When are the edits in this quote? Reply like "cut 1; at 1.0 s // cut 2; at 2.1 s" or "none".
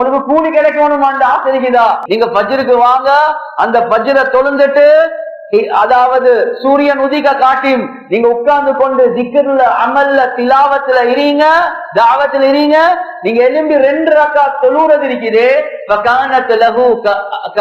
cut 1; at 2.0 s

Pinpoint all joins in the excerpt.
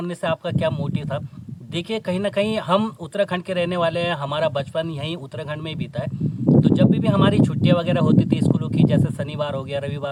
none

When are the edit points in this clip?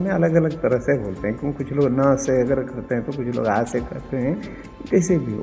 none

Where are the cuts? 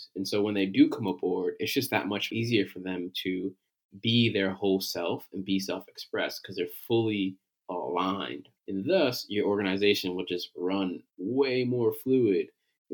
cut 1; at 2.3 s // cut 2; at 8.5 s

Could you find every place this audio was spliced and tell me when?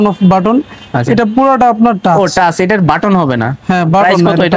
none

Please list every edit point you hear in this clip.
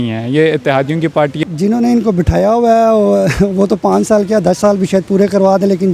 cut 1; at 1.4 s

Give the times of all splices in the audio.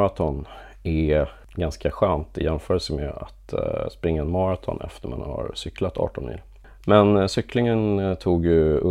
cut 1; at 1.4 s // cut 2; at 6.5 s

